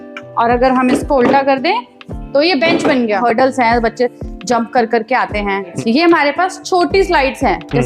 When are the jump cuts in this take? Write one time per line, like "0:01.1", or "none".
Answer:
0:03.2
0:05.7